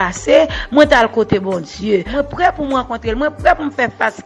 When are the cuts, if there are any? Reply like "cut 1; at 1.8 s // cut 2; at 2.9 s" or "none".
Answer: cut 1; at 2.1 s